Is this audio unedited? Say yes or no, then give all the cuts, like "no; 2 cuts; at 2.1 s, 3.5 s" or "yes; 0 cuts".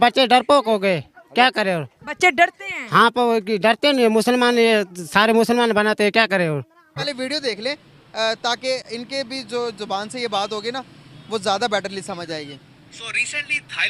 no; 1 cut; at 7.0 s